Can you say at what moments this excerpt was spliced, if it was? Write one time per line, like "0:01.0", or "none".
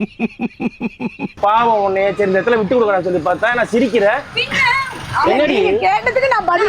0:01.4